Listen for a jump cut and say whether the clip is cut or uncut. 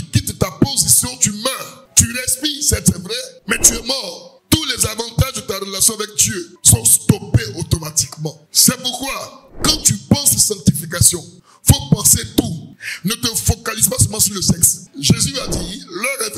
cut